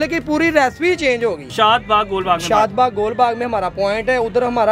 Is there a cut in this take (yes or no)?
yes